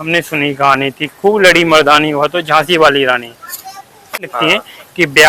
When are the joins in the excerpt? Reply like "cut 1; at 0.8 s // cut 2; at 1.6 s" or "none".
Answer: cut 1; at 4.3 s